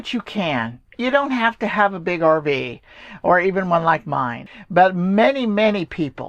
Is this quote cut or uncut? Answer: cut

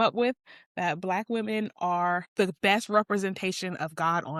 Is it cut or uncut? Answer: uncut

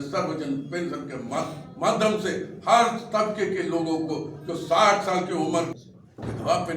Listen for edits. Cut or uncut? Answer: cut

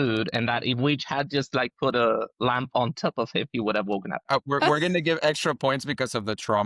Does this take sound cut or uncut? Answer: cut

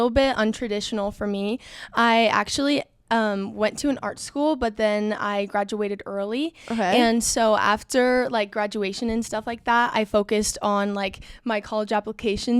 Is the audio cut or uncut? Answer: uncut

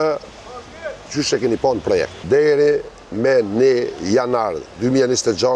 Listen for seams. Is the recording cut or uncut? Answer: cut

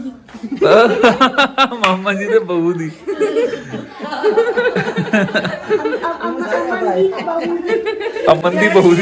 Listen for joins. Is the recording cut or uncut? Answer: uncut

